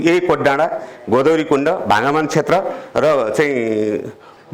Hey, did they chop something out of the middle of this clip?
no; 0 cuts

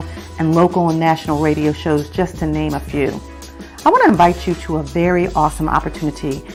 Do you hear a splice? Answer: no; 0 cuts

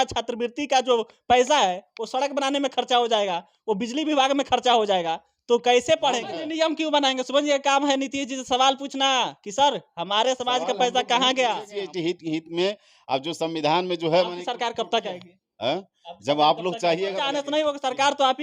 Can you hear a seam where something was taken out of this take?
yes; 3 cuts; at 6.3 s, 11.7 s, 17.2 s

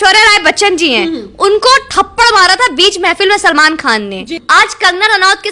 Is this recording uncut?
no; 1 cut; at 4.4 s

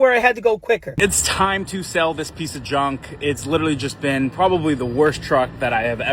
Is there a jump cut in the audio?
yes; 1 cut; at 1.0 s

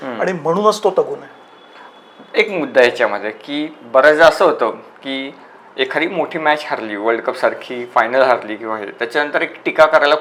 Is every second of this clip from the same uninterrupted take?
yes; 0 cuts

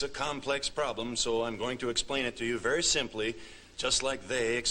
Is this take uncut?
no; 1 cut; at 1.1 s

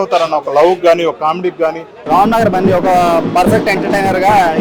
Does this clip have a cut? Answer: yes; 1 cut; at 2.0 s

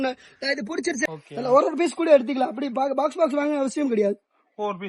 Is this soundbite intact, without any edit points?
no; 1 cut; at 1.0 s

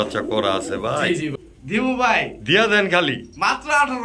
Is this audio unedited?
no; 1 cut; at 1.3 s

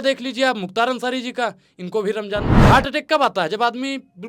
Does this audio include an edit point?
yes; 1 cut; at 2.7 s

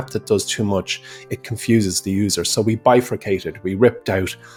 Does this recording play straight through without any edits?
yes; 0 cuts

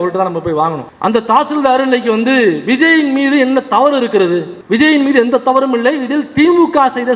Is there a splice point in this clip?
no; 0 cuts

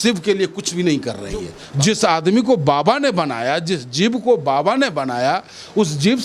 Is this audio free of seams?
no; 1 cut; at 1.6 s

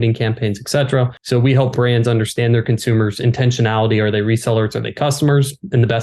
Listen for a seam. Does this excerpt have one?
yes; 1 cut; at 1.2 s

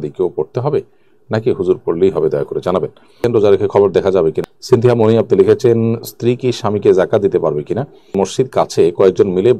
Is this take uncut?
no; 3 cuts; at 3.0 s, 4.4 s, 8.0 s

